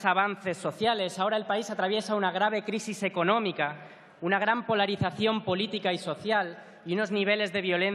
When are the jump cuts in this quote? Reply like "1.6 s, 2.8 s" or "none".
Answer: 6.2 s